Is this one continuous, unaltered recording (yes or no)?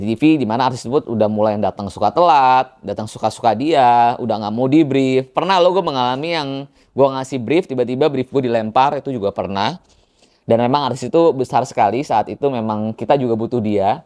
yes